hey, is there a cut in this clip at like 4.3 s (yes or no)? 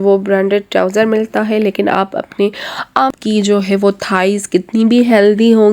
no